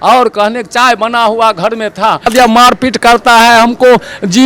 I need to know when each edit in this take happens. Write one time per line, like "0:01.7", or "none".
0:02.3